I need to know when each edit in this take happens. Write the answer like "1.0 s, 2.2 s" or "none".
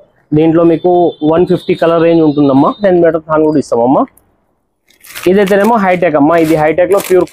2.8 s